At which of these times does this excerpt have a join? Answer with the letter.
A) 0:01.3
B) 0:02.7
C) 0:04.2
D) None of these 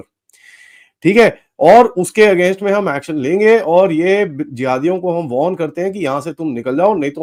D